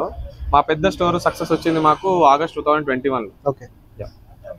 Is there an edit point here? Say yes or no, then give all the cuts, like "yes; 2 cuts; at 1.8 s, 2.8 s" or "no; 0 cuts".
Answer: no; 0 cuts